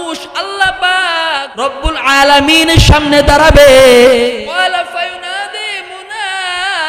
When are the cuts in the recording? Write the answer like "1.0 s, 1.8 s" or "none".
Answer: 1.5 s, 4.3 s